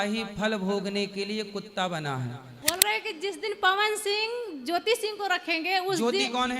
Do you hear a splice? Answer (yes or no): yes